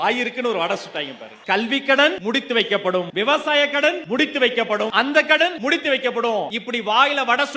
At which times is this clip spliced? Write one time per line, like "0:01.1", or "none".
0:02.2
0:04.0
0:04.9
0:05.6
0:06.6